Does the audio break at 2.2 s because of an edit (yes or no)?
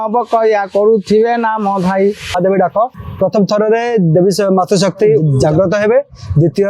yes